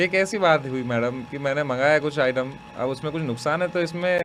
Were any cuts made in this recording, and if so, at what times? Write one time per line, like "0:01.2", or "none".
none